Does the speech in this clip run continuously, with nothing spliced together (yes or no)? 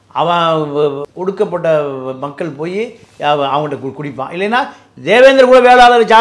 no